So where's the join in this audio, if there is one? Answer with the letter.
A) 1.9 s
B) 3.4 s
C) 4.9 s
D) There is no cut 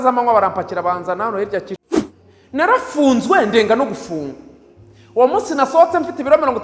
A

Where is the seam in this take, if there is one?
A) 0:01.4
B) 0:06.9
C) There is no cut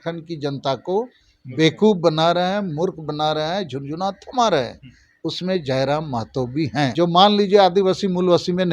B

